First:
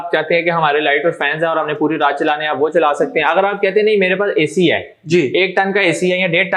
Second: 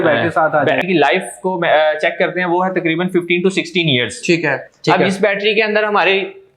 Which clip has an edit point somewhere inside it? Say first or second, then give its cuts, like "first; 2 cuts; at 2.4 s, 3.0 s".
second; 2 cuts; at 0.8 s, 4.7 s